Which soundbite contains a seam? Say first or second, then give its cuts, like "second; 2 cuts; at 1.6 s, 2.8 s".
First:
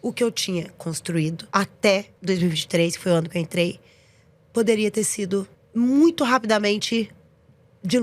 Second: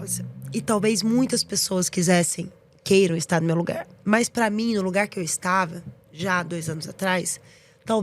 first; 3 cuts; at 1.4 s, 2.1 s, 5.6 s